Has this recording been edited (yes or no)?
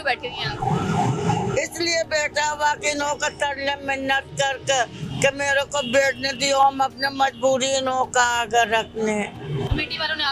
no